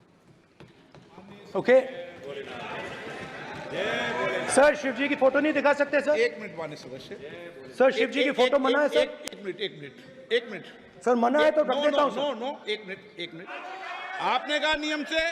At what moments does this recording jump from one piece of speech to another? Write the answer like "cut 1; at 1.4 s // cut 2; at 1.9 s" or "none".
cut 1; at 13.5 s